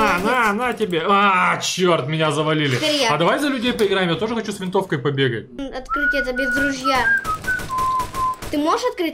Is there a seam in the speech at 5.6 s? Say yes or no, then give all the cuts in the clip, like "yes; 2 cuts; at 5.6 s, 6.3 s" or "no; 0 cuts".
yes; 1 cut; at 5.6 s